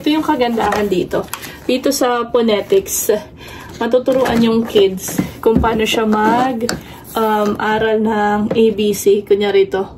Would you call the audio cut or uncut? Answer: uncut